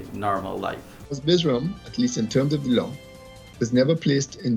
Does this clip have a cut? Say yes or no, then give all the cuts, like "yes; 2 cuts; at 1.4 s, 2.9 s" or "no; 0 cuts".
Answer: yes; 1 cut; at 0.9 s